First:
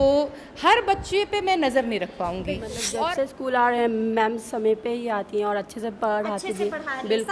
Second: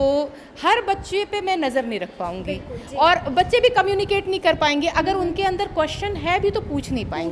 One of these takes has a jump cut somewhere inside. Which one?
first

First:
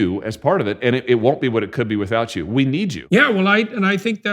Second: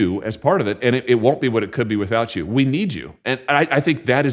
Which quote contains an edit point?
first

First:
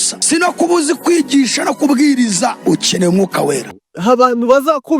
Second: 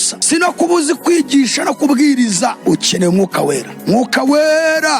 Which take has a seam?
first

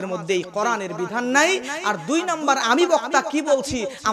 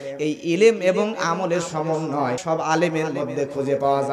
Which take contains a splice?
second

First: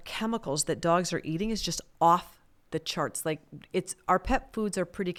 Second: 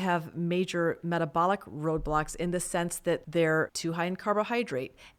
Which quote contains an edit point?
second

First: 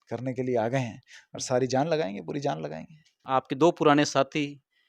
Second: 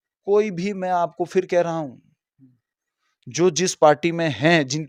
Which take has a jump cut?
first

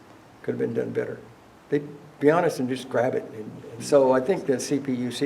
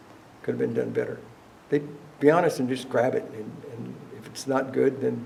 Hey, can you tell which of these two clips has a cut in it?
first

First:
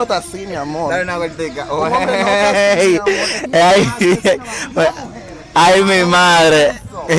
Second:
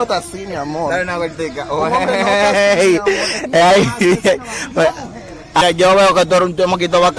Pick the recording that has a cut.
second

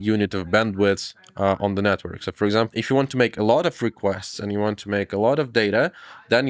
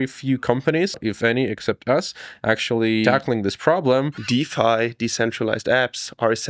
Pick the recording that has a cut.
second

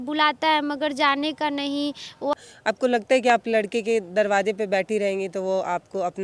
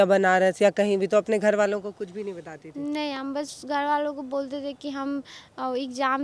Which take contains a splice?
first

